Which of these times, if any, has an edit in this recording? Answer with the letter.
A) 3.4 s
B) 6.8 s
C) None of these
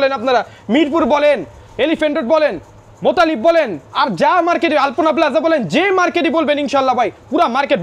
C